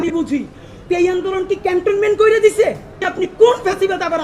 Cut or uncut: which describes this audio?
cut